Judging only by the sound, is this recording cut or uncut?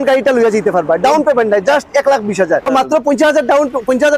cut